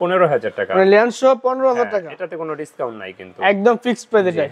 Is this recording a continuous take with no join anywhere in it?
yes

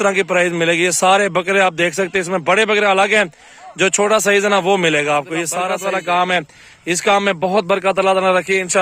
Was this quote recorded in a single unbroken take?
no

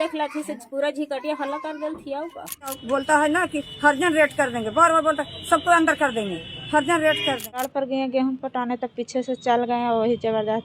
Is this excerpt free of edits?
no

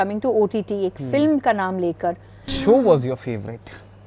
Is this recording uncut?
no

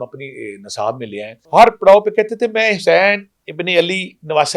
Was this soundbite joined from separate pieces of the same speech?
yes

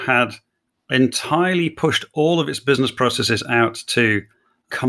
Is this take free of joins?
yes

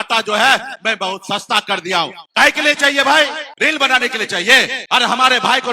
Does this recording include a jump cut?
yes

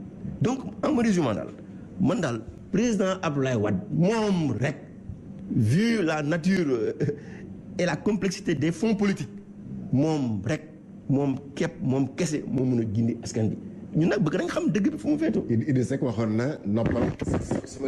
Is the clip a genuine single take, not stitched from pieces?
yes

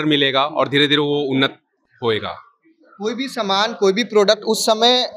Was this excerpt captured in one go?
yes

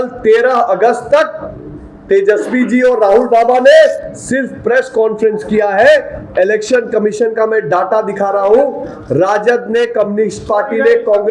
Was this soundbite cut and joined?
no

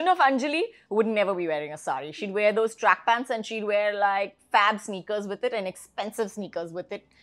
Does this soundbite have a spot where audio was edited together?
no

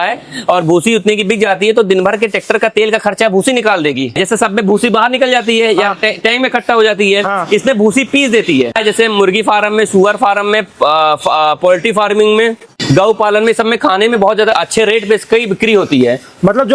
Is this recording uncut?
no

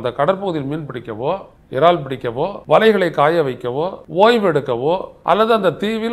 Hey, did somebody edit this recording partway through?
yes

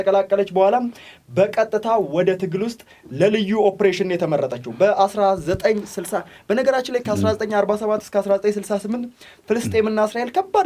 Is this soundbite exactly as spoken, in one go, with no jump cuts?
yes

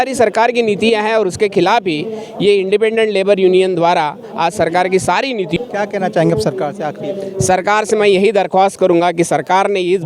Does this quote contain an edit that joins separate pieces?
yes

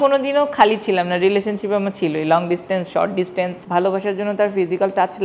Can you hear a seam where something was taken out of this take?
yes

